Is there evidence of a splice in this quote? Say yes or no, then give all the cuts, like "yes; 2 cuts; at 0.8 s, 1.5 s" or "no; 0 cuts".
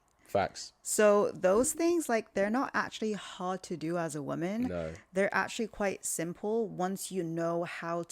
no; 0 cuts